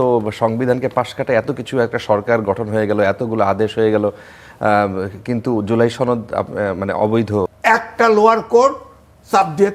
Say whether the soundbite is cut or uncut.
cut